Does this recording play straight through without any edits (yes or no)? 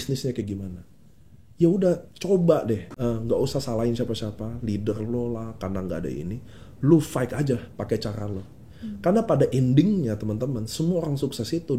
no